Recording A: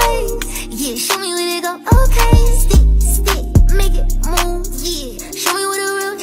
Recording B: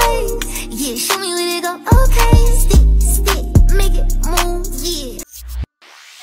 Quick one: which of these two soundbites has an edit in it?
B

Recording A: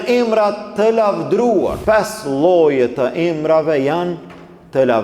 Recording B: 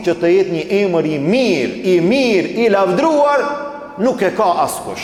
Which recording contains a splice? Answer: A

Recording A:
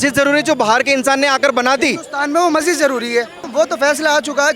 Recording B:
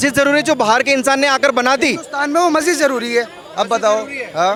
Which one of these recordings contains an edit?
A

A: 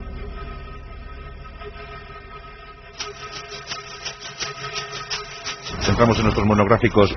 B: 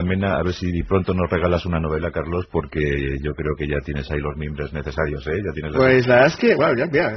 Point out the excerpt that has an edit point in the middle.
B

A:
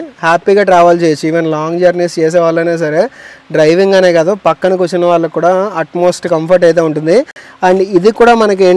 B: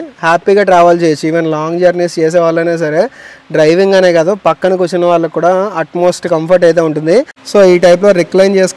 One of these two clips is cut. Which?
B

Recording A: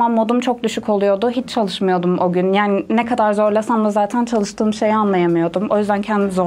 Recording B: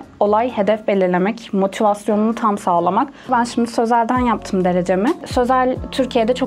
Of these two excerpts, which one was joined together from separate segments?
B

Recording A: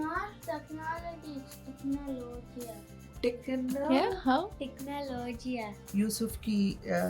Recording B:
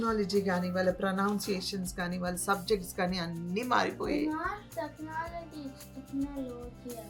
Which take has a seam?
A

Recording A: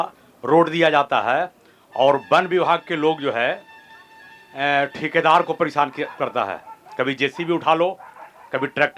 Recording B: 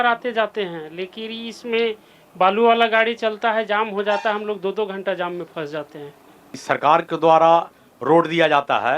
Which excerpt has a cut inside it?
B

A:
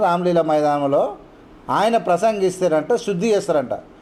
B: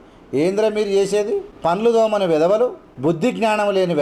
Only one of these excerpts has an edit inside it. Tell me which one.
B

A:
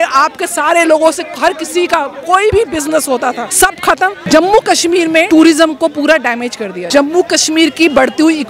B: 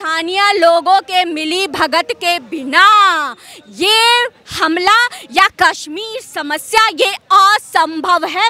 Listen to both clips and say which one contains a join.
A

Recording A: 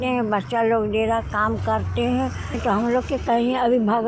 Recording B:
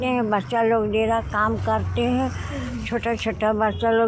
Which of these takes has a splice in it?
A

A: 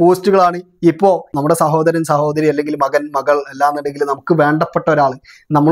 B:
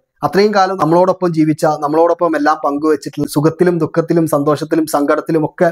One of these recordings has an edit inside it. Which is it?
A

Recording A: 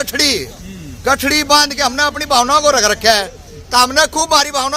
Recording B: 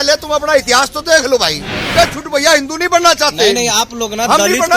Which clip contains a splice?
B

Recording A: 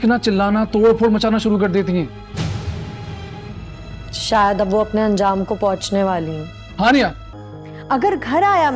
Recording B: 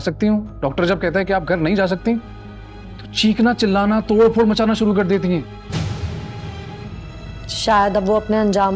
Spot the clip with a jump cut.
A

